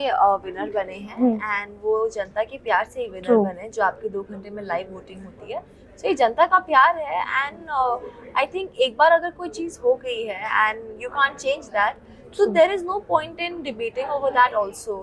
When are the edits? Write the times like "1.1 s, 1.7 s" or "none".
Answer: none

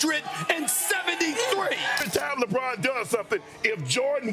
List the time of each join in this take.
1.9 s

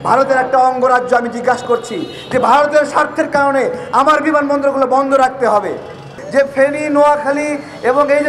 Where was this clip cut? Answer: 6.1 s

